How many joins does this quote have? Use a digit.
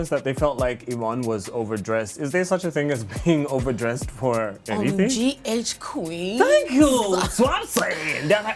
0